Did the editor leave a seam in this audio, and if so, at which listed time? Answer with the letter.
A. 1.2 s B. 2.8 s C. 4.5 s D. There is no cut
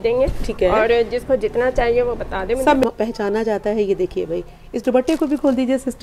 B